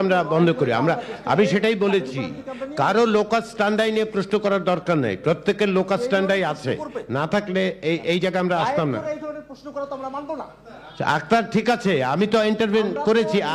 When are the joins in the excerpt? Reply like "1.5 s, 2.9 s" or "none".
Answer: none